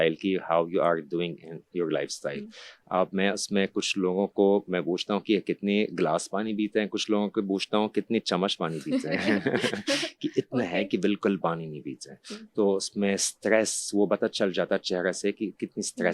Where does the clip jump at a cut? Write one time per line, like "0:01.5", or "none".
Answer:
none